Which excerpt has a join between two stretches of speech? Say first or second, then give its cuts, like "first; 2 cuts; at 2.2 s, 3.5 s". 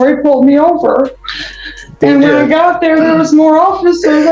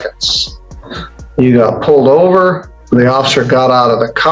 second; 1 cut; at 2.7 s